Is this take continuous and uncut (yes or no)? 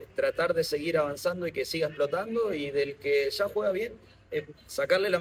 yes